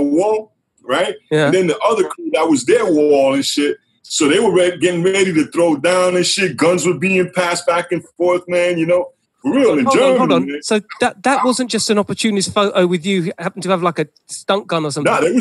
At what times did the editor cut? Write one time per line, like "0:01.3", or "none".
none